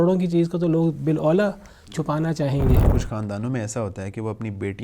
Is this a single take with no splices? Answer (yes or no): no